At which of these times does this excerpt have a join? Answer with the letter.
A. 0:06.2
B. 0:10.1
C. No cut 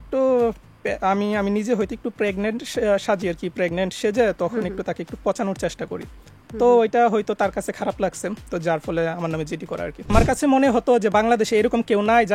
B